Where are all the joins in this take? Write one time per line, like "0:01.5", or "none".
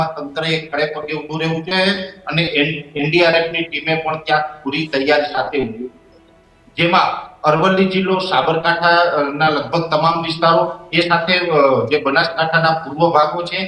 none